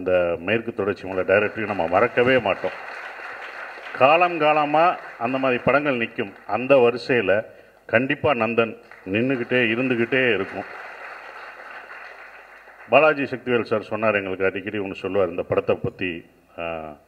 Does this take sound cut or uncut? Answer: uncut